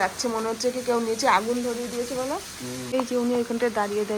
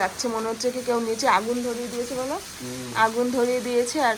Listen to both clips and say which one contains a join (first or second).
first